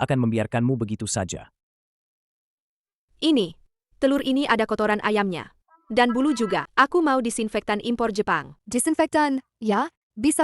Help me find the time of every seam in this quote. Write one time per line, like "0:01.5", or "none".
0:06.7
0:08.5